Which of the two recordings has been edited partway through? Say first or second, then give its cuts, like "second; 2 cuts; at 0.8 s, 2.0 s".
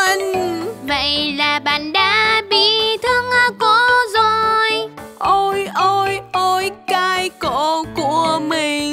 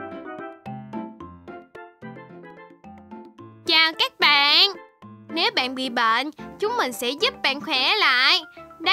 second; 1 cut; at 3.0 s